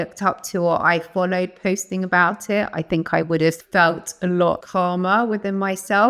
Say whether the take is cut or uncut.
cut